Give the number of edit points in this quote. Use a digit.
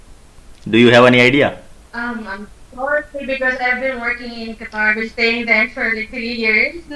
0